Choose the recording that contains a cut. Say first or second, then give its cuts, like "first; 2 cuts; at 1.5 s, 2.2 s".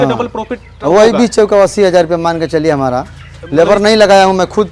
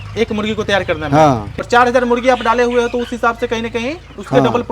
second; 1 cut; at 1.7 s